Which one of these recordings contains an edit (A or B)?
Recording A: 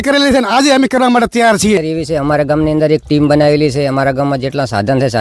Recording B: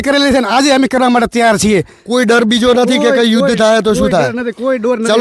A